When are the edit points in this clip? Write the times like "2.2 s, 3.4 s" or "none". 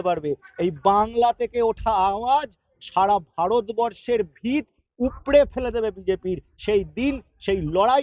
none